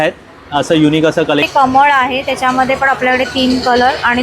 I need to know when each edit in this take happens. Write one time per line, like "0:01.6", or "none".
0:01.5